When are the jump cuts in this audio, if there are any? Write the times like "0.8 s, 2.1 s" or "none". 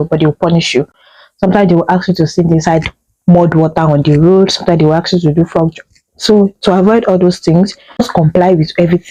none